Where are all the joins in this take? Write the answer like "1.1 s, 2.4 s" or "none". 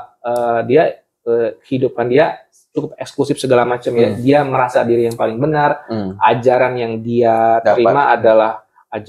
none